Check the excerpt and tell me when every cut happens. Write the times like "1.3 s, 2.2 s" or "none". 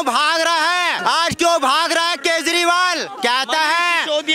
1.0 s